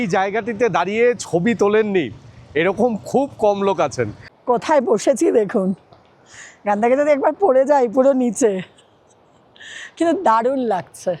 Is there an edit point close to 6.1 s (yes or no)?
no